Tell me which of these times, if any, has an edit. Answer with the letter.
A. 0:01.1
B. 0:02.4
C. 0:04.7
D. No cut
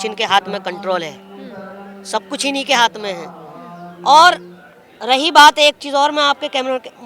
D